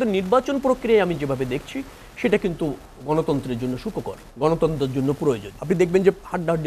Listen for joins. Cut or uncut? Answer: cut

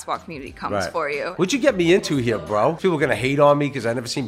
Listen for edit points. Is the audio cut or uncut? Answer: cut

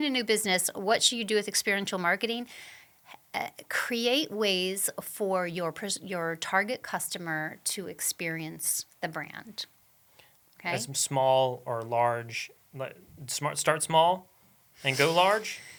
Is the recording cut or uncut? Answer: uncut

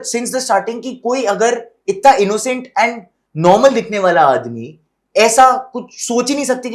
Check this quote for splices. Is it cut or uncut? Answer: uncut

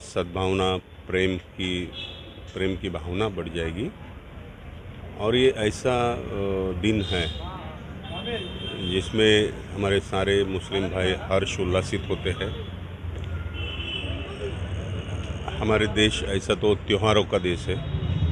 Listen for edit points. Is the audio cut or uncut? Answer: uncut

